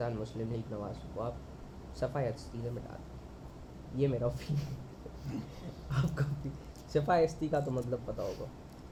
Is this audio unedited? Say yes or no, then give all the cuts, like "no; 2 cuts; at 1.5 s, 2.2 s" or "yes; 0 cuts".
yes; 0 cuts